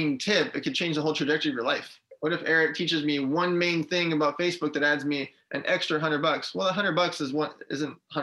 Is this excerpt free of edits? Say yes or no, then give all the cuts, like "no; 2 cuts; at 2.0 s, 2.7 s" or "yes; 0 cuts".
no; 1 cut; at 2.0 s